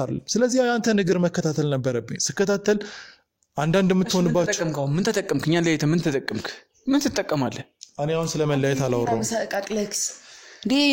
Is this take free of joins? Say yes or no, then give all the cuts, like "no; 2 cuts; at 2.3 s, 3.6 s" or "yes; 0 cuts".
yes; 0 cuts